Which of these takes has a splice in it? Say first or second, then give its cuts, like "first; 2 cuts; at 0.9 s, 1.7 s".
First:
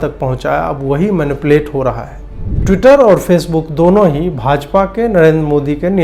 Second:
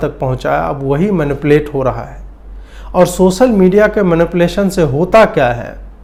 first; 1 cut; at 2.6 s